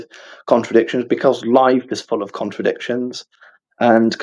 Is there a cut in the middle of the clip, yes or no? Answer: no